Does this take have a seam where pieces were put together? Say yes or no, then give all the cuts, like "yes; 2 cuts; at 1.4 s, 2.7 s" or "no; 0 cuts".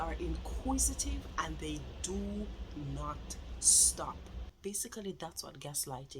yes; 1 cut; at 4.4 s